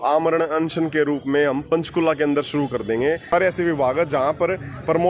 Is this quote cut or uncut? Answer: cut